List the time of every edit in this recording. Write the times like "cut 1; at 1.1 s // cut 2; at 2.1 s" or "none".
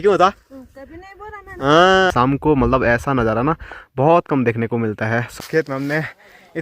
cut 1; at 2.1 s // cut 2; at 5.4 s